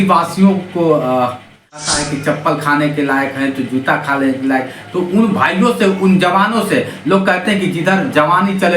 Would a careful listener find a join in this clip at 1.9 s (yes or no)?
yes